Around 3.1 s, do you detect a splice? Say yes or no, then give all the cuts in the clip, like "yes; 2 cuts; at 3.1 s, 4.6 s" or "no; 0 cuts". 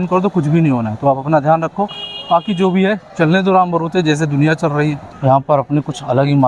no; 1 cut; at 5.1 s